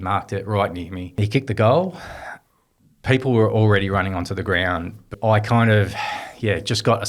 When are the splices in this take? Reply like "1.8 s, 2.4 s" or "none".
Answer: 1.2 s, 5.1 s